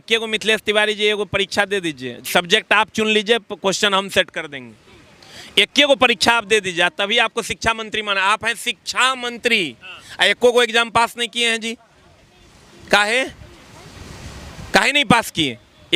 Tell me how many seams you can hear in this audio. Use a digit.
0